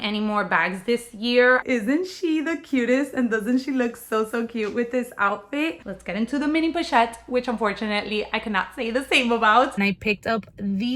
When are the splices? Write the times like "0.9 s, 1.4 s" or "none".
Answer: 1.6 s, 5.9 s, 9.7 s